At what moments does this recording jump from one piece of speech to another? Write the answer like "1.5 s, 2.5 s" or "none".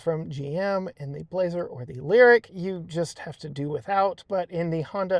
2.5 s